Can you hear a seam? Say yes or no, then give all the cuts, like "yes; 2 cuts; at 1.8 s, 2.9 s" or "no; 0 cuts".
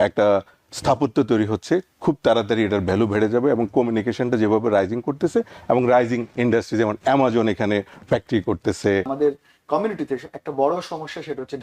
yes; 1 cut; at 9.1 s